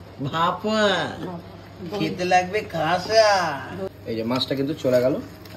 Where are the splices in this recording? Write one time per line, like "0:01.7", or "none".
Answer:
0:03.9